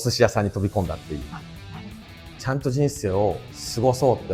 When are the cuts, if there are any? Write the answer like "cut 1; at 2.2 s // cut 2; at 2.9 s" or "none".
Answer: cut 1; at 1.7 s